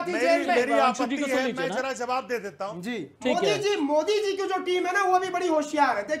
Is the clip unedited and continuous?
no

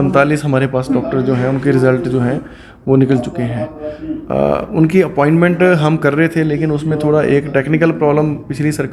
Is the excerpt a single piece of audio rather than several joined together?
yes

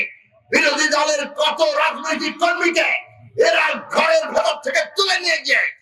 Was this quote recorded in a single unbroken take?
yes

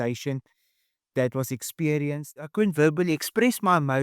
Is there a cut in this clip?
yes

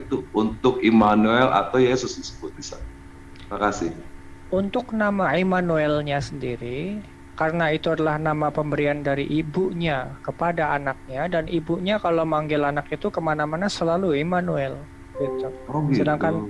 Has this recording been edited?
no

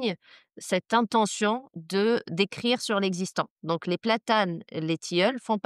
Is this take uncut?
yes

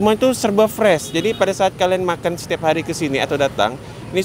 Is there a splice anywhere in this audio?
no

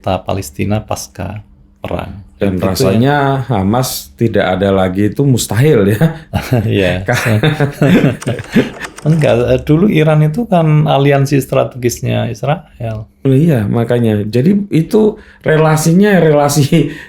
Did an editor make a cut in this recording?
yes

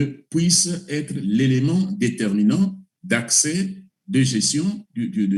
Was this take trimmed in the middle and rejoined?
no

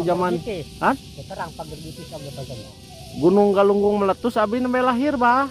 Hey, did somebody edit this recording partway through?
no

